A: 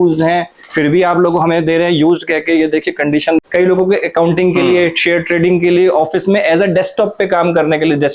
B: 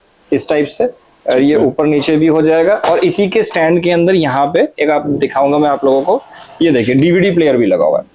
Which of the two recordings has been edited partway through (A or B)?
A